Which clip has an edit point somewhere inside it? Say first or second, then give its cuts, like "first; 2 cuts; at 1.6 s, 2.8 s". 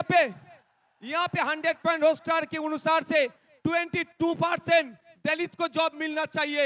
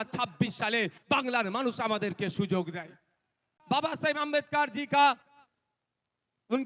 second; 1 cut; at 3.5 s